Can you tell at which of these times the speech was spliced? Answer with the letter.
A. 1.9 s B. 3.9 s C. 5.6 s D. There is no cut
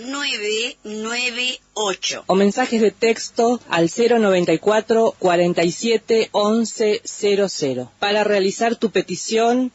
A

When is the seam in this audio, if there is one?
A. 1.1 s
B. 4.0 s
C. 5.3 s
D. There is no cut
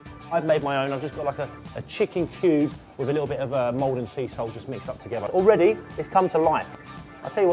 B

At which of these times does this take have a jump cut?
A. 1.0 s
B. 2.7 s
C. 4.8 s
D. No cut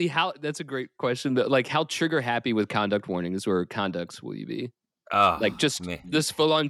D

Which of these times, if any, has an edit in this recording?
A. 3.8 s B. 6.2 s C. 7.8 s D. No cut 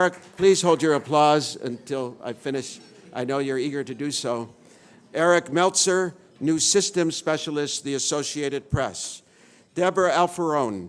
C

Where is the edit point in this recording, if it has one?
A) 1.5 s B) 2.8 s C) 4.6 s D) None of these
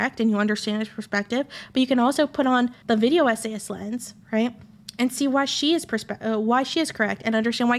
B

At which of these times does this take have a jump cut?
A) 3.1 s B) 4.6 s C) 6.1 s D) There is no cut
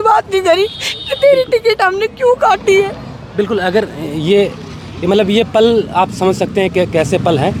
D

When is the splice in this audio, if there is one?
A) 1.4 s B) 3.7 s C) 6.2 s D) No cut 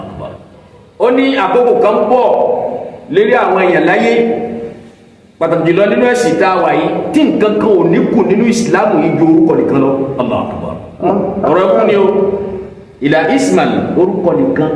D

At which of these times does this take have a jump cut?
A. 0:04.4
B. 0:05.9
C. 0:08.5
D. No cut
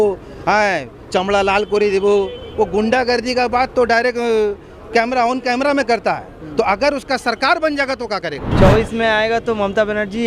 C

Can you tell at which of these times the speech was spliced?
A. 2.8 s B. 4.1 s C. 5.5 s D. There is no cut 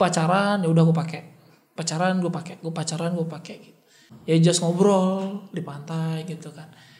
B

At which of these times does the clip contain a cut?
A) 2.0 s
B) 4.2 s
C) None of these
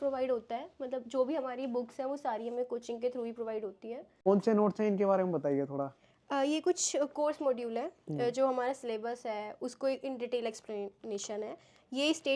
B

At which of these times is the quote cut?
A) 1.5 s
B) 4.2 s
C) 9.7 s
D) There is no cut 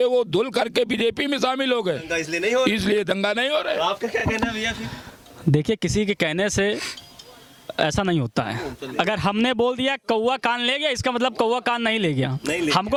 D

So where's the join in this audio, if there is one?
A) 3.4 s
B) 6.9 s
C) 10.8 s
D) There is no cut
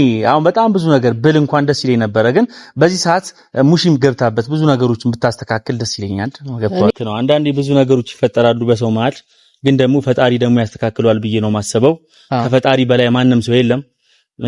B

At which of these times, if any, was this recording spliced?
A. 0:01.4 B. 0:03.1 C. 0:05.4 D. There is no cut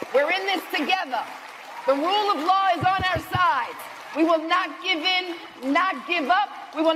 D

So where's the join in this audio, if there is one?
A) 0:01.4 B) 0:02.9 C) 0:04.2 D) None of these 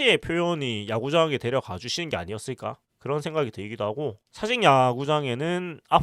C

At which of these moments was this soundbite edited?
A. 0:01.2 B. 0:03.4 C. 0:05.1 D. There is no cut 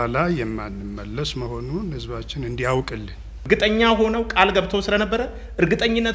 B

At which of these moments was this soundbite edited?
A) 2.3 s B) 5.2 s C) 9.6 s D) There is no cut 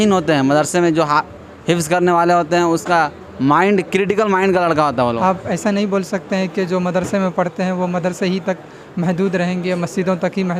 B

